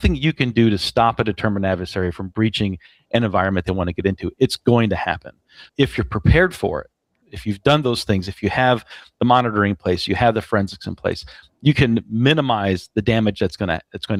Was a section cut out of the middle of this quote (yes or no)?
no